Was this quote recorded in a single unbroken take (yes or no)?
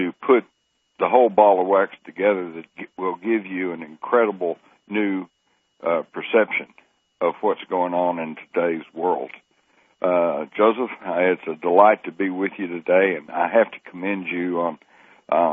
no